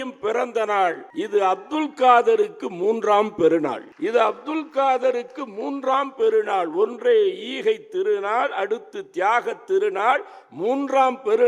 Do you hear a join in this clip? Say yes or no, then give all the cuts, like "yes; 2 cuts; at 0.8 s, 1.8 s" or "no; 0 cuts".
yes; 2 cuts; at 1.1 s, 3.9 s